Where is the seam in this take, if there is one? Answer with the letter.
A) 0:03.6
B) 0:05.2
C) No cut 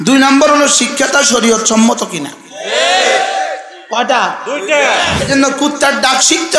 B